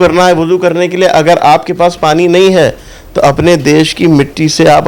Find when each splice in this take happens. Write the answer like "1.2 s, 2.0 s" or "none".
none